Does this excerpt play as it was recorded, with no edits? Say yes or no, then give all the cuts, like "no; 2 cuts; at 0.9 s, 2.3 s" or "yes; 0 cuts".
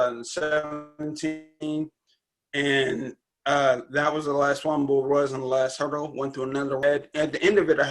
yes; 0 cuts